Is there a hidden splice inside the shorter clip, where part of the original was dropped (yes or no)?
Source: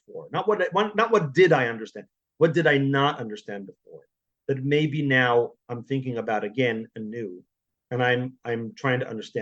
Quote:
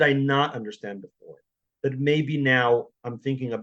no